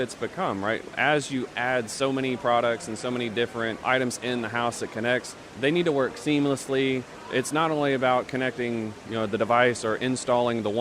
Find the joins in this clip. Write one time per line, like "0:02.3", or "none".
0:03.8
0:05.4
0:07.1